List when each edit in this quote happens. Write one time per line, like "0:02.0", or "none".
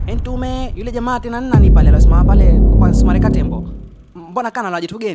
none